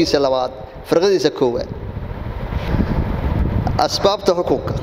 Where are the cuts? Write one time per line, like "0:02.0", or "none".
none